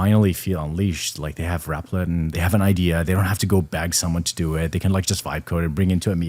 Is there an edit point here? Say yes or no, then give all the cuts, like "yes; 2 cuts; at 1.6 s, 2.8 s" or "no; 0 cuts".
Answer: no; 0 cuts